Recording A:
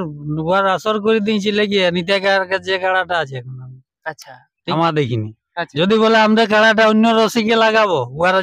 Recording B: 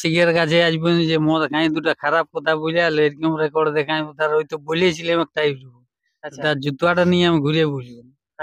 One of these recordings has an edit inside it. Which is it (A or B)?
A